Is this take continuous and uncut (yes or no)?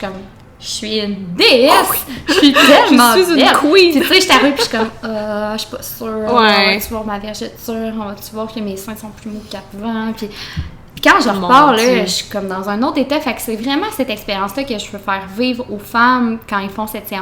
yes